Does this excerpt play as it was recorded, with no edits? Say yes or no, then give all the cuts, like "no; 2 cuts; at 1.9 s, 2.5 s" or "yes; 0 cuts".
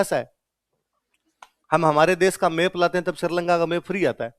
yes; 0 cuts